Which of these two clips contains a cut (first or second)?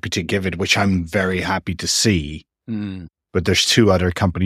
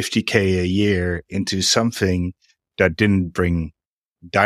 first